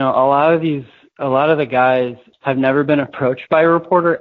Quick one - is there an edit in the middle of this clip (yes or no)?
yes